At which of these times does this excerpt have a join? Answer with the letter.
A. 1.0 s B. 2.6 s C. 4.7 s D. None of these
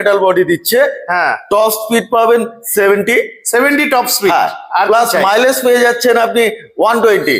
D